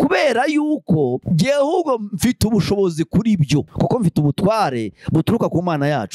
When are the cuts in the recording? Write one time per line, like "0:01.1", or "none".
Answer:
none